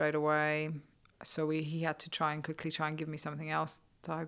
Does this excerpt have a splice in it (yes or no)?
no